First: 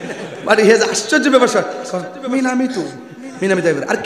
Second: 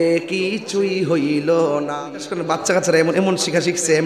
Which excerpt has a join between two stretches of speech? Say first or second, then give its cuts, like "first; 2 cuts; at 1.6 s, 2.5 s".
second; 1 cut; at 1.9 s